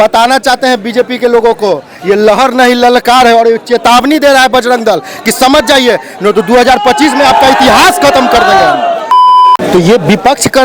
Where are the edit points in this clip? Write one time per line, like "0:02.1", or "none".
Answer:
0:09.2